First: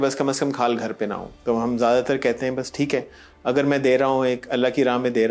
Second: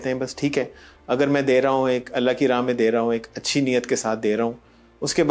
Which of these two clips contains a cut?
first; 1 cut; at 1.3 s

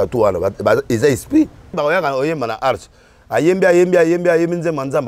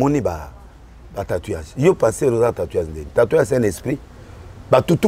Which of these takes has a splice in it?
first; 1 cut; at 1.8 s

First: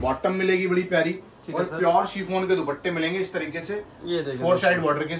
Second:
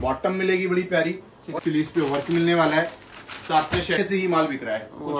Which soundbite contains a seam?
second; 2 cuts; at 1.4 s, 4.0 s

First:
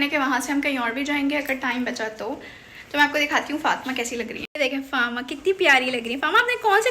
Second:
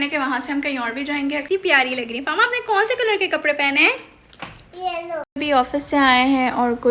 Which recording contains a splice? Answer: second; 2 cuts; at 1.4 s, 5.3 s

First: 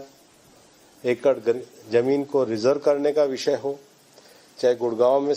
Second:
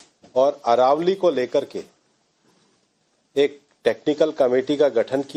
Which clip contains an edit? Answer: first; 1 cut; at 3.3 s

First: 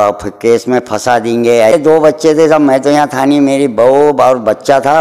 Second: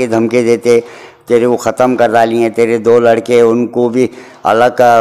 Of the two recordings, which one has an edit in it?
first; 1 cut; at 1.7 s

